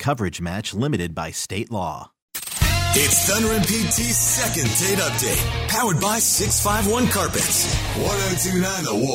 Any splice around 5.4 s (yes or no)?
no